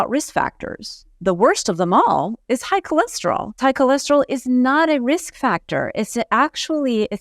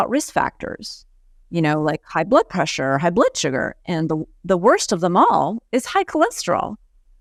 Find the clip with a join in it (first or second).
first